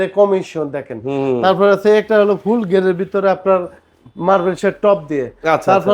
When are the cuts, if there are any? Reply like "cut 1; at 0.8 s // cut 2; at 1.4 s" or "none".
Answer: none